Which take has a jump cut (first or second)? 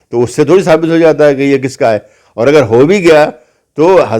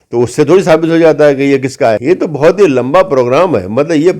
second